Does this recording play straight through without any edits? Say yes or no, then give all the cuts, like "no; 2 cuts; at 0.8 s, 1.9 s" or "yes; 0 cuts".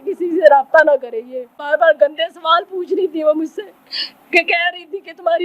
no; 1 cut; at 1.7 s